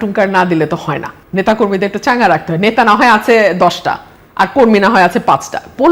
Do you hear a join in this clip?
no; 0 cuts

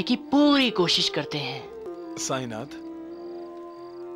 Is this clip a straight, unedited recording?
no; 1 cut; at 1.9 s

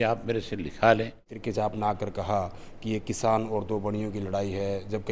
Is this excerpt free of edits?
no; 1 cut; at 1.3 s

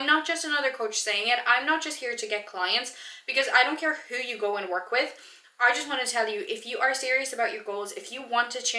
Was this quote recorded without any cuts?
yes; 0 cuts

